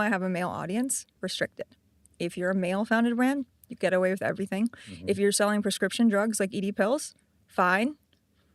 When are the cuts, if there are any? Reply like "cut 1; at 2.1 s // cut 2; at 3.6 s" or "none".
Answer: cut 1; at 1.1 s